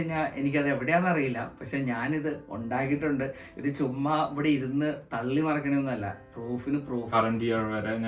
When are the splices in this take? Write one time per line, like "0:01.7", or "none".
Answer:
0:07.1